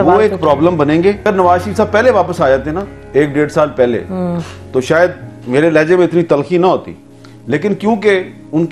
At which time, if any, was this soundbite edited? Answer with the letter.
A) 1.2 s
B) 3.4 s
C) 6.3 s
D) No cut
A